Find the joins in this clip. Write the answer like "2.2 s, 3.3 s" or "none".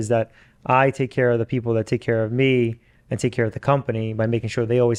none